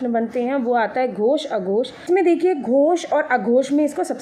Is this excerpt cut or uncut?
cut